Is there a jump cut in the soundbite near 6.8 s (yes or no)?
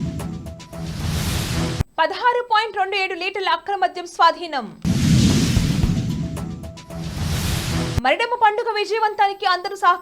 no